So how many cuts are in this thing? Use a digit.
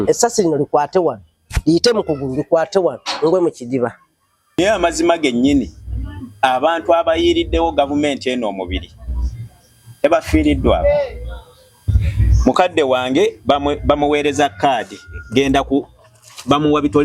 1